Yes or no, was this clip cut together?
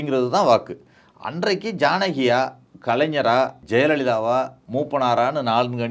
yes